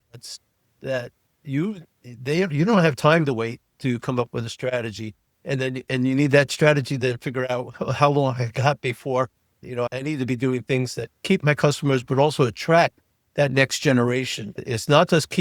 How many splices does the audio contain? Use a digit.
2